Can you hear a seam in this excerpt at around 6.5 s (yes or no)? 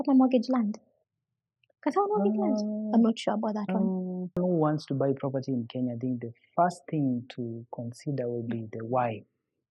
no